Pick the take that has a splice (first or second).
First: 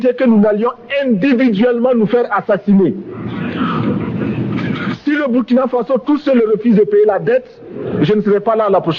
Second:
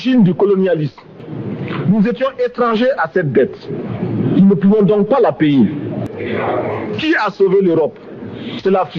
second